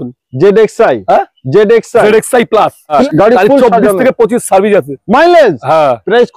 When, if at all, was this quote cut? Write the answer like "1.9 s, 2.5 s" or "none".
3.0 s